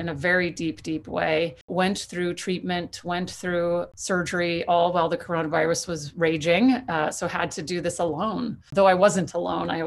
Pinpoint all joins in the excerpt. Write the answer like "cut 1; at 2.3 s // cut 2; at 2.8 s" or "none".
cut 1; at 1.7 s // cut 2; at 3.9 s // cut 3; at 8.7 s